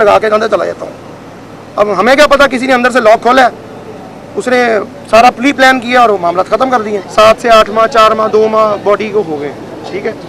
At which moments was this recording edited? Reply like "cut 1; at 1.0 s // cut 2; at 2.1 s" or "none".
cut 1; at 7.0 s

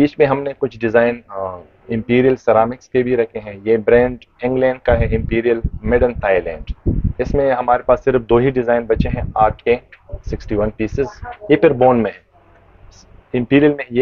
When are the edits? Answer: none

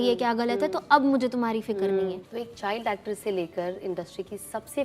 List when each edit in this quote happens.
cut 1; at 2.2 s

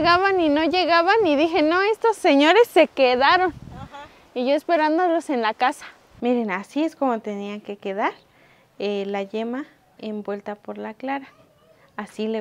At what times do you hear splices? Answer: cut 1; at 6.2 s // cut 2; at 9.8 s

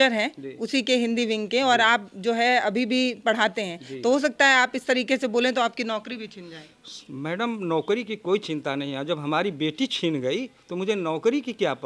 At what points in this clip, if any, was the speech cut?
none

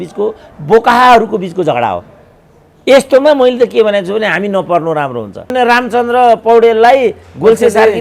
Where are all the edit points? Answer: cut 1; at 5.5 s

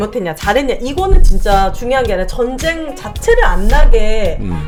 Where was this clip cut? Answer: none

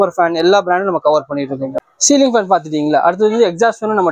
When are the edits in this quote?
none

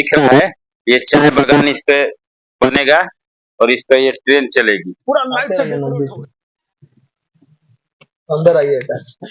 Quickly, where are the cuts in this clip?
cut 1; at 5.5 s

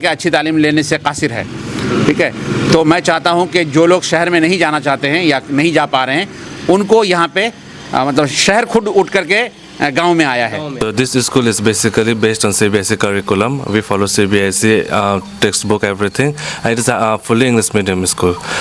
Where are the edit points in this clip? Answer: cut 1; at 10.7 s

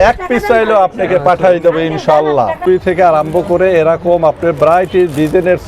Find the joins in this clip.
cut 1; at 2.7 s

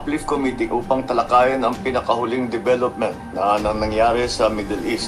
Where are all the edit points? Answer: none

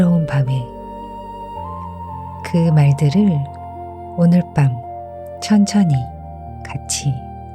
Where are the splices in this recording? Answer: none

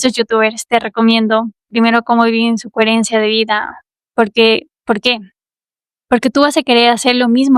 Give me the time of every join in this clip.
cut 1; at 1.6 s

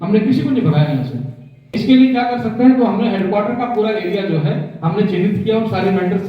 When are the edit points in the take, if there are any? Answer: cut 1; at 1.8 s

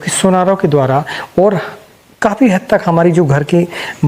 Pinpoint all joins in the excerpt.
none

